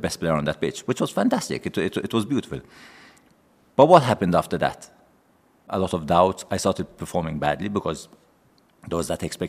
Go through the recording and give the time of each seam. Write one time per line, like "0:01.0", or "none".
0:05.7